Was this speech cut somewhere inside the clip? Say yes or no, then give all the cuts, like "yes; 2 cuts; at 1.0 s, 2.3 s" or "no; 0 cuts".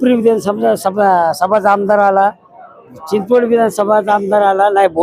no; 0 cuts